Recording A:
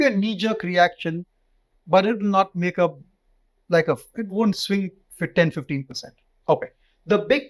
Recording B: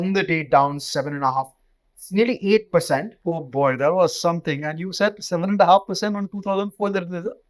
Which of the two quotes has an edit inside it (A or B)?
B